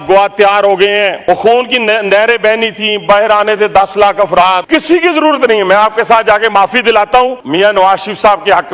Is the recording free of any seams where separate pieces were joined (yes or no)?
no